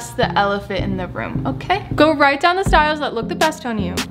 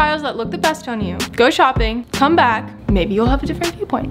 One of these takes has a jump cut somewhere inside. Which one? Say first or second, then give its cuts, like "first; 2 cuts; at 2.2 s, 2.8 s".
first; 1 cut; at 1.9 s